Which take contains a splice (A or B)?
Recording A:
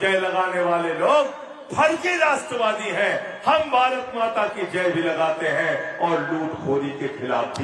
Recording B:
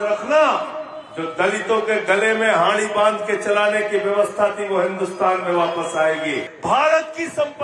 B